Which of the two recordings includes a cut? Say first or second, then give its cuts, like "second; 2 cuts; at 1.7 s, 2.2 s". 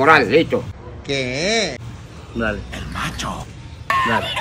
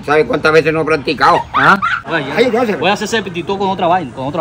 second; 1 cut; at 2.0 s